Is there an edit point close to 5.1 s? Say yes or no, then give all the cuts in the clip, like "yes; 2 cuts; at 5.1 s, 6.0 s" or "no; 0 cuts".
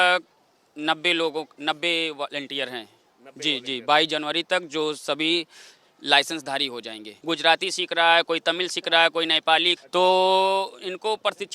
no; 2 cuts; at 7.1 s, 9.7 s